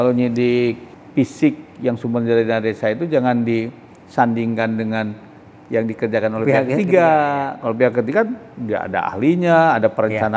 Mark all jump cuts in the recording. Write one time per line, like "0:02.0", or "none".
0:00.9